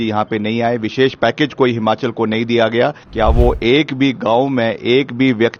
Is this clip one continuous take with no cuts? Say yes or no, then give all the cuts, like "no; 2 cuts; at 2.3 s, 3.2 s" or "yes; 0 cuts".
no; 1 cut; at 3.0 s